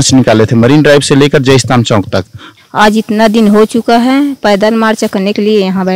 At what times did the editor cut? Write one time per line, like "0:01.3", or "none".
0:02.4